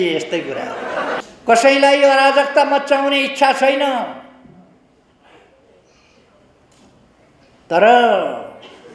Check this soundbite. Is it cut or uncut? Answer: cut